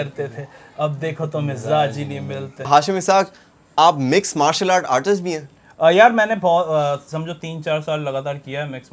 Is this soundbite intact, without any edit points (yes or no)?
no